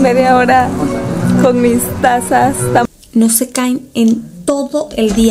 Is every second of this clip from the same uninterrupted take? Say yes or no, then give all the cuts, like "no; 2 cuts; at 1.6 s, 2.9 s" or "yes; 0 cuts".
no; 1 cut; at 2.9 s